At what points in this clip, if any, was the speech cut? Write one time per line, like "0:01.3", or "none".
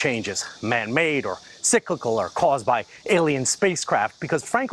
0:02.1